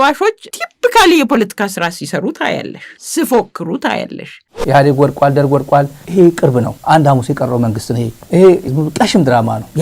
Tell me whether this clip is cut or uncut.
cut